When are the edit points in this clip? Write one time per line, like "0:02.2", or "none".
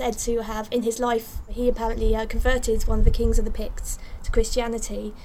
0:01.5